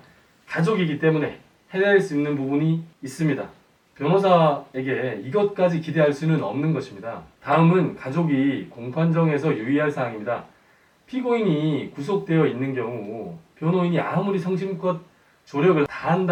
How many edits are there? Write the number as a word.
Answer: zero